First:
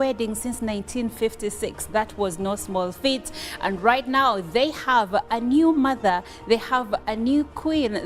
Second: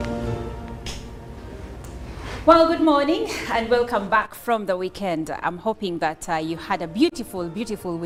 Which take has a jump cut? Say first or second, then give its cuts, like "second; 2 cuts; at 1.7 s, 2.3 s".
first; 2 cuts; at 3.4 s, 4.6 s